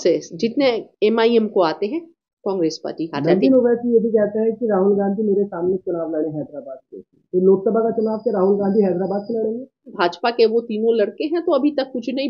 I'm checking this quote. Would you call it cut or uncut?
cut